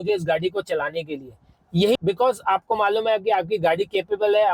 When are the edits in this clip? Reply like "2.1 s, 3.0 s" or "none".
2.0 s